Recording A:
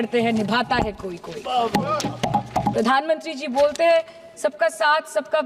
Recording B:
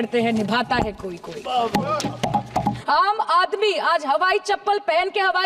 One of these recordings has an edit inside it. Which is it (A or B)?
B